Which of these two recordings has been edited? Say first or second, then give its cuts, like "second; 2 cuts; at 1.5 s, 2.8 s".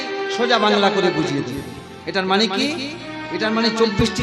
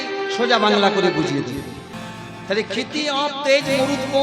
second; 1 cut; at 1.9 s